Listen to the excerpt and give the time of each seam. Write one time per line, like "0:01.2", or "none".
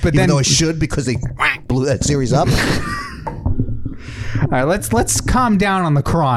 none